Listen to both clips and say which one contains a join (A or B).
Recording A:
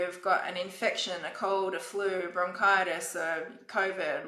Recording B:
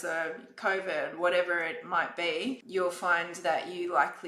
B